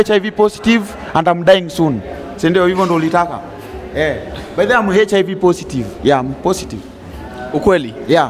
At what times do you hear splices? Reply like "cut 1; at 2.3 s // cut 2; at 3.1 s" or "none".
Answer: none